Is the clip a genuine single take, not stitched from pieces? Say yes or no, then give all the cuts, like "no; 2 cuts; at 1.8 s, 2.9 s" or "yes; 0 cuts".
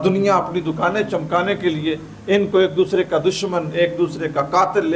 yes; 0 cuts